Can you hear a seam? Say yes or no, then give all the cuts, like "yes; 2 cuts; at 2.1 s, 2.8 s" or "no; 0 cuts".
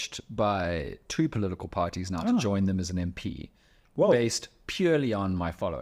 no; 0 cuts